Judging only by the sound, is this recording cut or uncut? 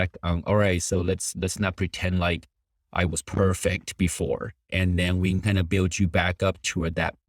uncut